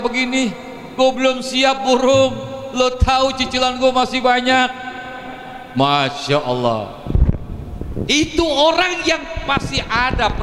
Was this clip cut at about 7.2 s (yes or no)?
no